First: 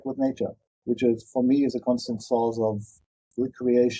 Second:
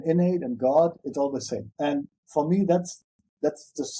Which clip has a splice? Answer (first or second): second